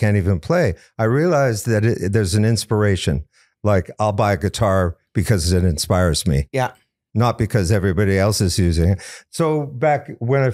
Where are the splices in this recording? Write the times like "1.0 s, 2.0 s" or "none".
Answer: none

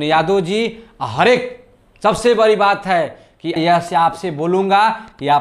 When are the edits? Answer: 3.6 s

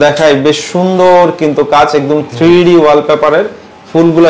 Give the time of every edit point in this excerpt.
none

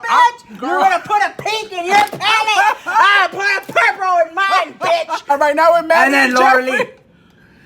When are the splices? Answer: 5.3 s

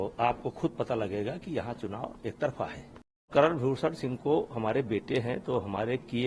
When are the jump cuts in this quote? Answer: 3.3 s

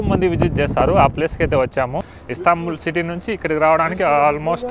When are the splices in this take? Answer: 2.1 s

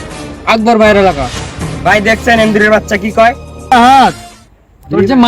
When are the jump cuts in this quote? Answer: 3.7 s

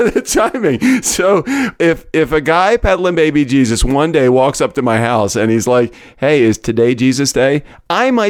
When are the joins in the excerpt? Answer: none

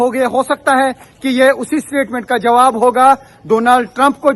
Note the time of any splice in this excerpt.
none

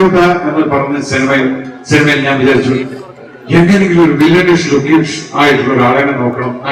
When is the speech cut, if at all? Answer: none

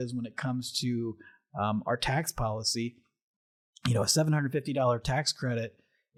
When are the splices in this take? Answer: none

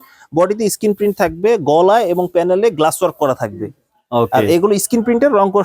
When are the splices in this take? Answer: none

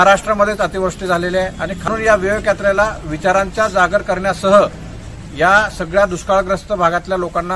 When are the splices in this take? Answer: 1.9 s

